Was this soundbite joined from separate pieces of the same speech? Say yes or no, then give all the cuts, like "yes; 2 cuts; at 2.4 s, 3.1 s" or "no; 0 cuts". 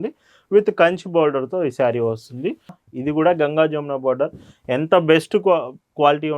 yes; 1 cut; at 2.8 s